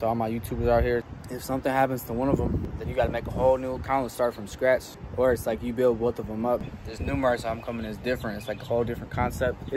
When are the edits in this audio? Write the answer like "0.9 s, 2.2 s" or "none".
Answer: 1.1 s, 2.6 s, 5.0 s, 6.7 s